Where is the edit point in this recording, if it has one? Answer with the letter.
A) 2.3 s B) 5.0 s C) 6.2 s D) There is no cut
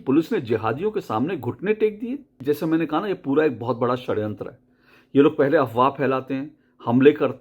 A